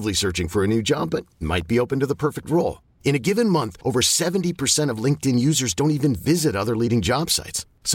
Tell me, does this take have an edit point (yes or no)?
no